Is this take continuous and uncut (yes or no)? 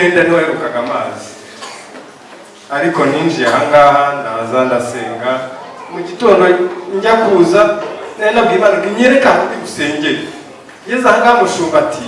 yes